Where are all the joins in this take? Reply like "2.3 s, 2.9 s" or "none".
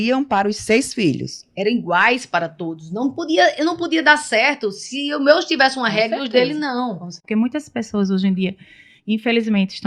7.2 s